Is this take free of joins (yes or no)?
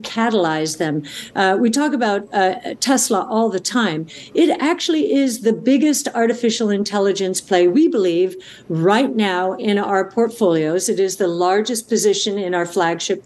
yes